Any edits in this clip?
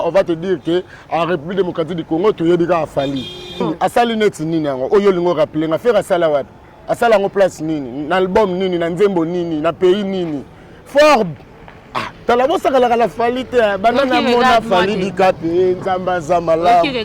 yes; 1 cut; at 3.6 s

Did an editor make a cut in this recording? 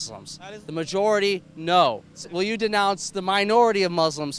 yes; 1 cut; at 2.2 s

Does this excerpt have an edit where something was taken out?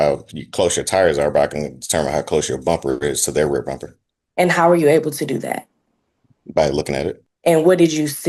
no; 0 cuts

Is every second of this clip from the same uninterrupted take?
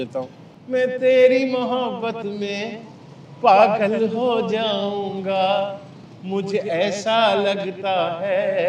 yes; 0 cuts

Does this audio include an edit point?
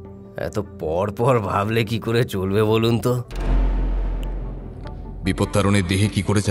yes; 1 cut; at 5.2 s

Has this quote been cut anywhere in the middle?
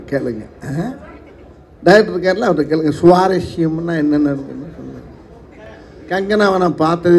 yes; 1 cut; at 5.7 s

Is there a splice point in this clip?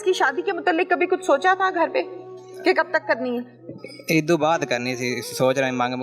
no; 0 cuts

